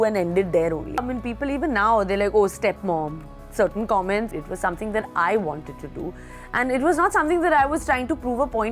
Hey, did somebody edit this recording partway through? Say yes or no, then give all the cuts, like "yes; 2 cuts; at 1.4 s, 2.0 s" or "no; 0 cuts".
yes; 2 cuts; at 1.0 s, 4.3 s